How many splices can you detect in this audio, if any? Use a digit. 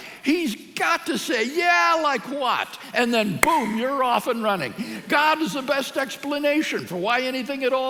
0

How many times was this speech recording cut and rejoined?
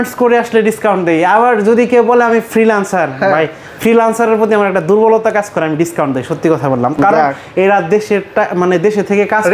0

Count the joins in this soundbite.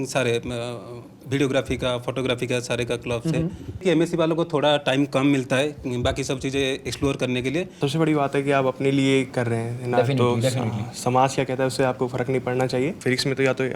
3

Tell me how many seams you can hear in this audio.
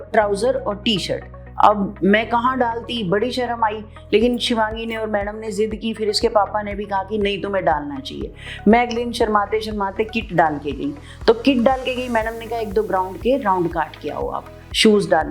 0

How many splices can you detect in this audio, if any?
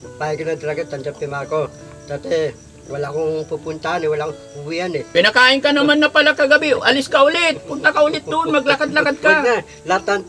1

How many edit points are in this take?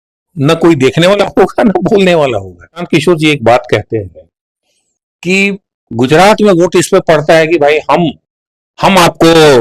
1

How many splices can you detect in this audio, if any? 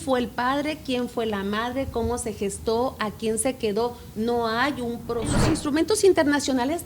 1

